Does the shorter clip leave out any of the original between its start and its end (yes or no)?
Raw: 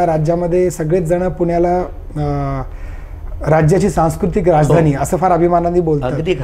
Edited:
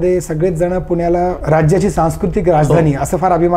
yes